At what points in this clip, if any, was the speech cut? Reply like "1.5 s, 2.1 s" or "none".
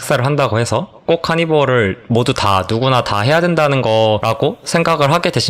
1.0 s, 4.2 s

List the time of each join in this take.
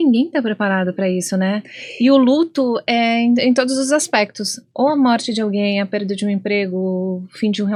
none

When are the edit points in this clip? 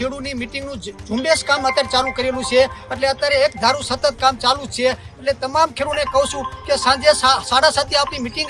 none

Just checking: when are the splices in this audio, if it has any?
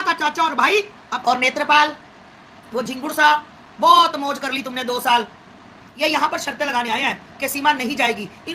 1.0 s, 5.8 s

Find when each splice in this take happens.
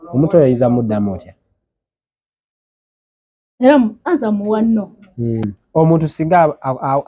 5.5 s

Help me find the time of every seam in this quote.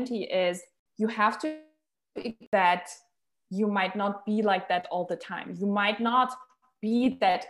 2.4 s

